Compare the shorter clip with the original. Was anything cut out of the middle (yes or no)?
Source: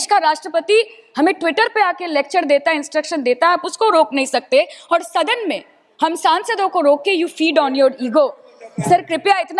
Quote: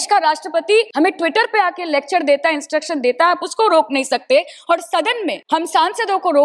yes